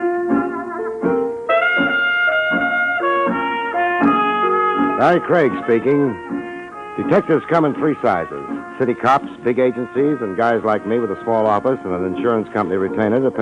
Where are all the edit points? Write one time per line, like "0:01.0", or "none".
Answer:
0:12.1

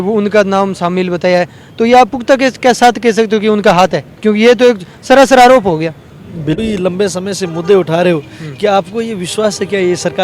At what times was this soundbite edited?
0:06.5

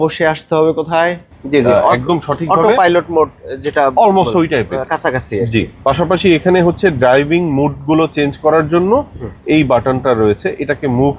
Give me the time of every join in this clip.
0:01.2

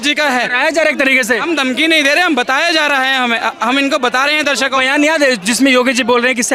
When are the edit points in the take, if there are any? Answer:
none

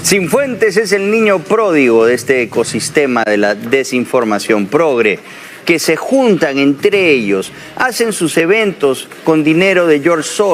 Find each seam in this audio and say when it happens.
none

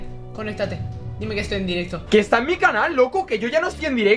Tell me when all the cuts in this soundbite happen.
0:02.0

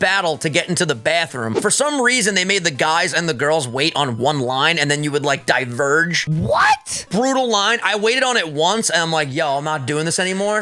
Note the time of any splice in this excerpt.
0:01.6
0:06.5

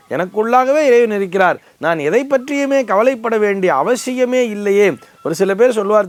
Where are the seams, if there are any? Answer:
none

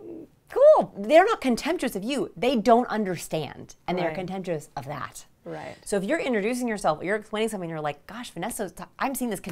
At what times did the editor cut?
0:01.0

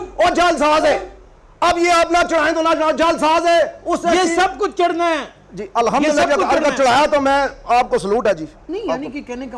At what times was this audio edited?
none

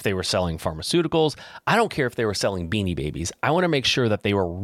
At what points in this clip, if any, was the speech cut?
none

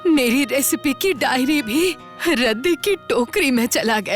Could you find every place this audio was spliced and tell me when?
0:02.1

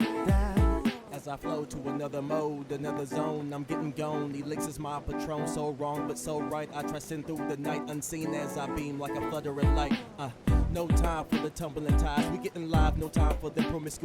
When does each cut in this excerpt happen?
0:01.0

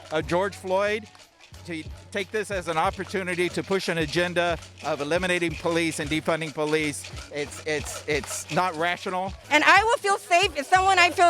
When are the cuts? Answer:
0:09.4

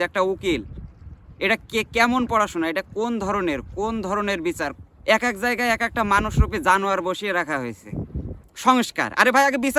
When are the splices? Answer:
0:04.7
0:08.4

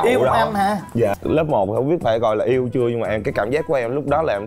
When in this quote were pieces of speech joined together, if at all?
0:01.2

